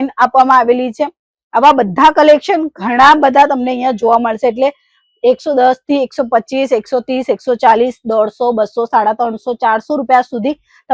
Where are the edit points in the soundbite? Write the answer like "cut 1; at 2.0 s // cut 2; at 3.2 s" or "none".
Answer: none